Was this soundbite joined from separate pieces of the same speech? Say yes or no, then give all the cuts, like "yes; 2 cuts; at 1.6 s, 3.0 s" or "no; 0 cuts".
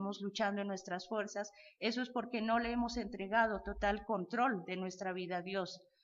no; 0 cuts